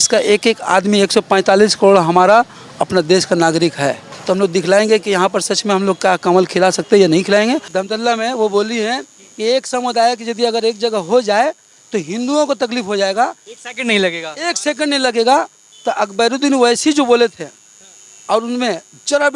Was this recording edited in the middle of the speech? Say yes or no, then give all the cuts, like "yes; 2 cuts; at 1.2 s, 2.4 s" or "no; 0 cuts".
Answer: yes; 2 cuts; at 4.2 s, 7.7 s